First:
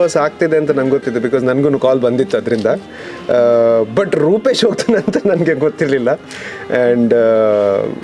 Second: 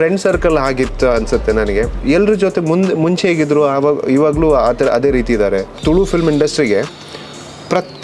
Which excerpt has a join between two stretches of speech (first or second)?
second